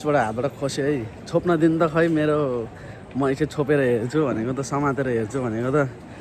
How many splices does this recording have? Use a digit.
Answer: 0